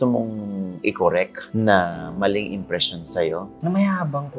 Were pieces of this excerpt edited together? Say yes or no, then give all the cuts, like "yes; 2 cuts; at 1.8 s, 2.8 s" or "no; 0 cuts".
yes; 1 cut; at 3.5 s